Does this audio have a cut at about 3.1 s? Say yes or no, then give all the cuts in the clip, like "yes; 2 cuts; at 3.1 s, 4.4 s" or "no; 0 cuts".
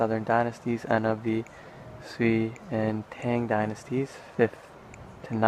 yes; 1 cut; at 3.1 s